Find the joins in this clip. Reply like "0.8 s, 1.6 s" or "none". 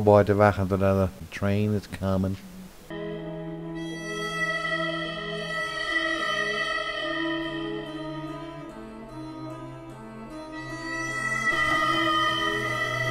1.2 s